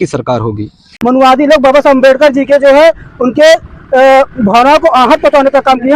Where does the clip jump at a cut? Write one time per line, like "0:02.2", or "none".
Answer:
0:00.9